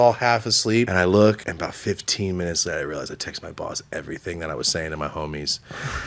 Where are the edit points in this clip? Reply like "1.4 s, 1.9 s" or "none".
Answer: 0.9 s, 1.5 s